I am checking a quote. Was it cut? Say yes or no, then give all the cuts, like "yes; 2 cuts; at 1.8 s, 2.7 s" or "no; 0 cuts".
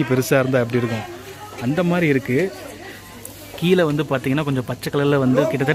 no; 0 cuts